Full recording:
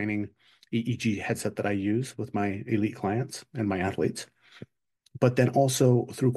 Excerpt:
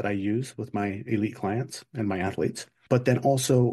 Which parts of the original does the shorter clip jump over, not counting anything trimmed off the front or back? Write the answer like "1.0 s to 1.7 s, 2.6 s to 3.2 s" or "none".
4.3 s to 5.0 s

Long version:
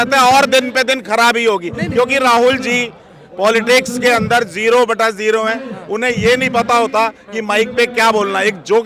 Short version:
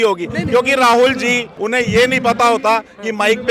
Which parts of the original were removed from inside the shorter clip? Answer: 3.0 s to 5.8 s

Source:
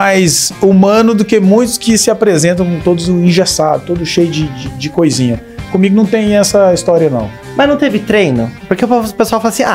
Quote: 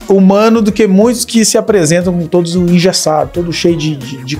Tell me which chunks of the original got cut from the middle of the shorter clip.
none

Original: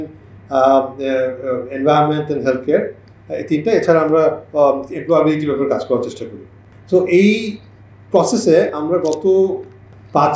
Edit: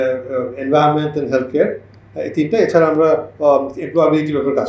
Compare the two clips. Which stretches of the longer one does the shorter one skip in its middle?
none

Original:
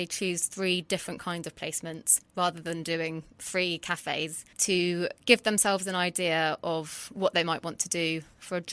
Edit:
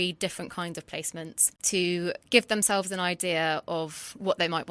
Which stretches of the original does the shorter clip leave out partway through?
2.2 s to 4.4 s

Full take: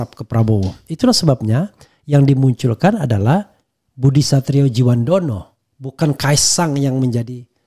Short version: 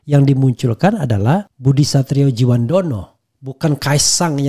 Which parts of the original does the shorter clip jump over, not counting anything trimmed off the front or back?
3.5 s to 3.9 s

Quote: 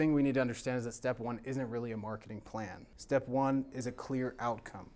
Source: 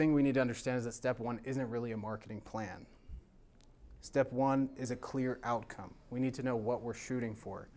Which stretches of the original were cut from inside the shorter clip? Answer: 2.9 s to 3.9 s

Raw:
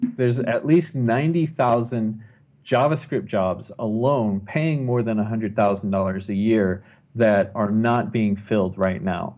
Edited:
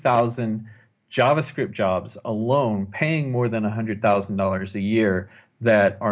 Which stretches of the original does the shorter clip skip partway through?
none

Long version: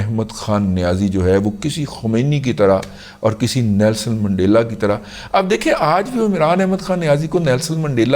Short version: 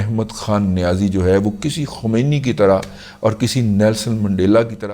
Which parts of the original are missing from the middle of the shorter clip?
none

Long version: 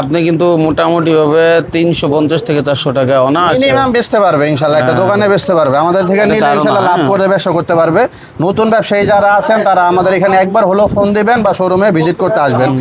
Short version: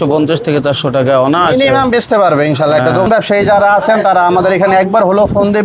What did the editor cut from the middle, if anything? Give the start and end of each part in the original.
5.1 s to 8.7 s

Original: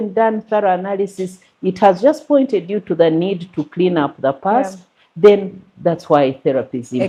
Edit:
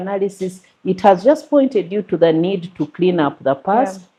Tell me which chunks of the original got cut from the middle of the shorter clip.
none

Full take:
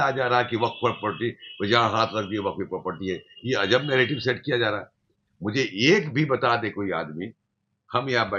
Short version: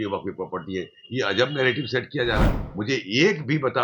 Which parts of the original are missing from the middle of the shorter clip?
4.9 s to 5.3 s

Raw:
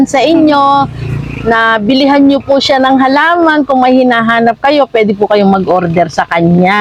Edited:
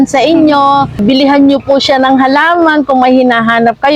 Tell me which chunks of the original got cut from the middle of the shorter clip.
1.0 s to 1.8 s

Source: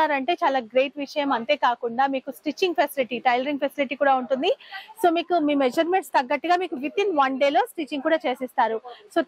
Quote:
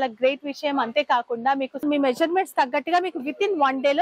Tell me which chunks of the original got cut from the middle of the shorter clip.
2.4 s to 5.4 s

